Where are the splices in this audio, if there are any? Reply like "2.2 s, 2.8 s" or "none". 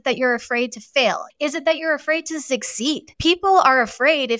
1.2 s, 3.1 s